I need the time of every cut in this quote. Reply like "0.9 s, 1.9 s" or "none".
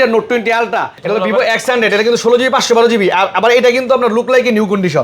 0.9 s